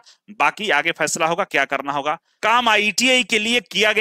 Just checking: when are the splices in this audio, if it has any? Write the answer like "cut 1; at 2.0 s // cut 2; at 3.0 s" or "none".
cut 1; at 2.4 s